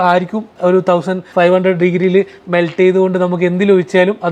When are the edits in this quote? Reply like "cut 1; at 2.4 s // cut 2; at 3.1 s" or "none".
none